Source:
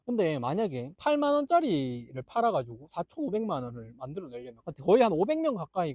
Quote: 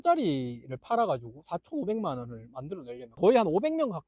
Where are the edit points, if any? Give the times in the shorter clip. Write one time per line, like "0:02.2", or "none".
0:03.0